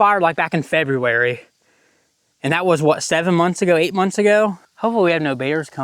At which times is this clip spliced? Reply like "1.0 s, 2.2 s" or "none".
4.7 s